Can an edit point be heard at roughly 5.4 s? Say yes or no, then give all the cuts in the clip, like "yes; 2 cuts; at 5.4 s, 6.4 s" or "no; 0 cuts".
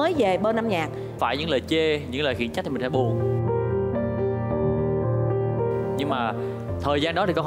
no; 1 cut; at 1.1 s